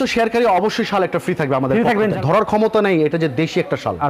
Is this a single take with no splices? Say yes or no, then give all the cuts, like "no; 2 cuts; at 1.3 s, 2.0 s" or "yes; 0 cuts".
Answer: no; 1 cut; at 2.2 s